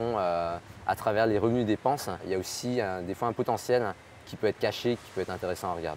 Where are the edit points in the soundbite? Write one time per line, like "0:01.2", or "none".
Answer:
0:02.2
0:05.0

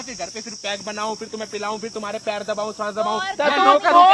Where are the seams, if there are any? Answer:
none

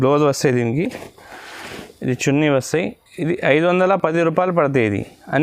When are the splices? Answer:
none

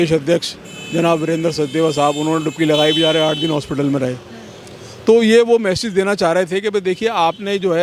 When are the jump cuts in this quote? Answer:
none

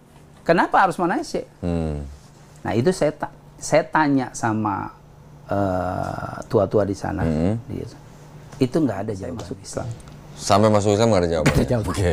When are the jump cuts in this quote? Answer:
0:09.5

